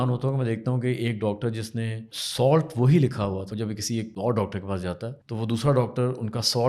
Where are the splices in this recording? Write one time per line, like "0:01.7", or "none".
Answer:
0:02.2
0:03.9
0:05.2